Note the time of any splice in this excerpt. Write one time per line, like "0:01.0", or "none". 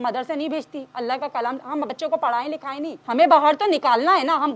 0:03.0

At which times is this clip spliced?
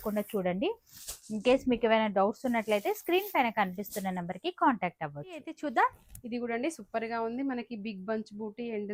none

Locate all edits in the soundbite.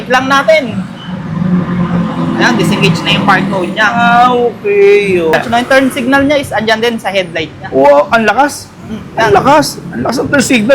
0:05.3

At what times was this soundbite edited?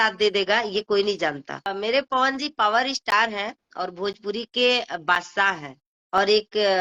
0:01.7

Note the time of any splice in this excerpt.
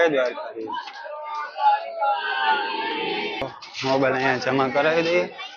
0:03.6

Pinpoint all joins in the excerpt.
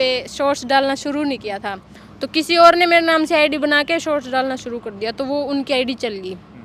none

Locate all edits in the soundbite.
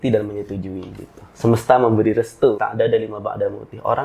0:02.6

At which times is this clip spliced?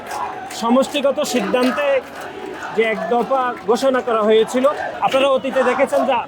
0:04.9

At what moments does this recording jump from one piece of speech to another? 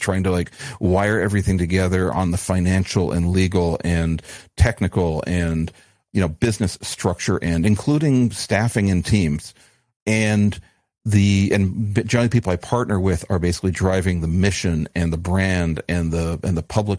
0:05.9
0:09.6

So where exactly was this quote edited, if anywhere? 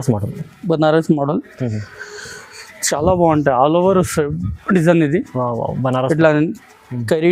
none

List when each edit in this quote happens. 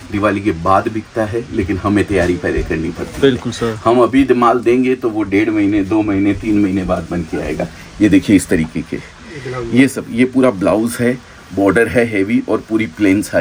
none

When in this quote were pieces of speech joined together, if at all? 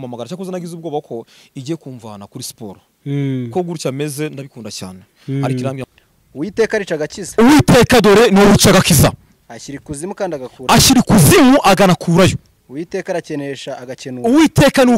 0:05.8

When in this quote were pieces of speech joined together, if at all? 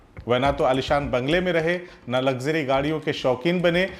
none

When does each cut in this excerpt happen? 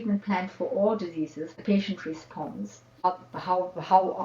0:01.6
0:02.9

